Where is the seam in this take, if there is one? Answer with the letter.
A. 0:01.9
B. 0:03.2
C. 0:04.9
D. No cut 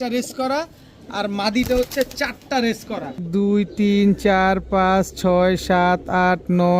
B